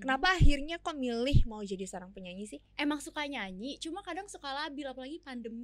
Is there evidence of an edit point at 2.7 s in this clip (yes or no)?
yes